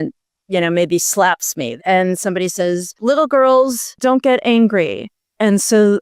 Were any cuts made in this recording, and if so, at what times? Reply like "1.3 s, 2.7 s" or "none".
1.7 s, 2.9 s, 4.0 s